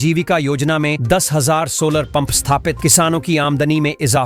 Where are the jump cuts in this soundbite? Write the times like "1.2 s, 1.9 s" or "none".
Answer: none